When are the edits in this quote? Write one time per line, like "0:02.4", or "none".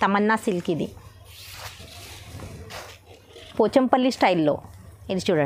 0:03.5